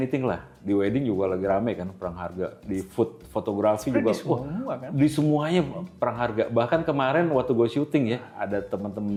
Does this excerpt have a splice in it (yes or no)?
no